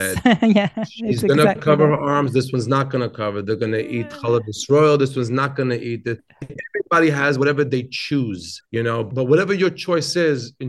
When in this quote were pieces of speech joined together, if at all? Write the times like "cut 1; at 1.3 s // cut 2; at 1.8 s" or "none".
cut 1; at 6.3 s // cut 2; at 9.1 s

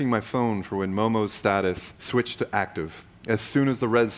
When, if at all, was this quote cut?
cut 1; at 1.9 s

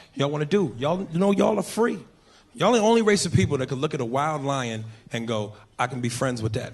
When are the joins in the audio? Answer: cut 1; at 1.2 s

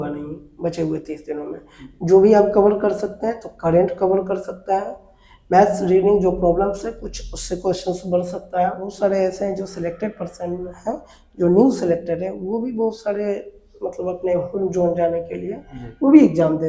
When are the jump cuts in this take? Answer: cut 1; at 8.9 s

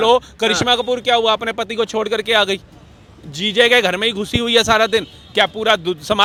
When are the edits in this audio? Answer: none

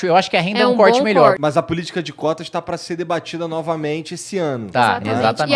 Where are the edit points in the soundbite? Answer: cut 1; at 1.4 s

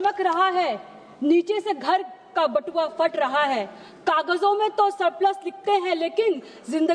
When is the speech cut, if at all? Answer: none

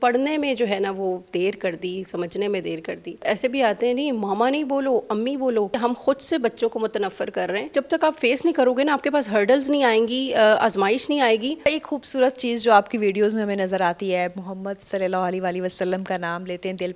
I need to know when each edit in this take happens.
cut 1; at 3.2 s // cut 2; at 5.8 s // cut 3; at 7.7 s // cut 4; at 11.7 s

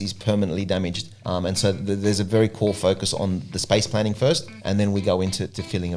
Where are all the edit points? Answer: none

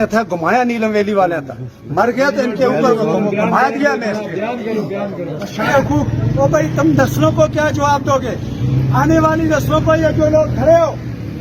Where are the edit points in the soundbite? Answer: cut 1; at 5.7 s

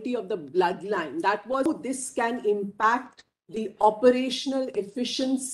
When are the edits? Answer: cut 1; at 1.7 s

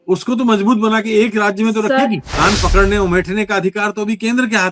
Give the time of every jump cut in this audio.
cut 1; at 2.3 s

